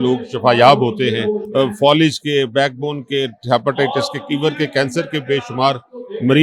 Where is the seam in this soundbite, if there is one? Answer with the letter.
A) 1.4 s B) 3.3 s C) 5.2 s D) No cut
A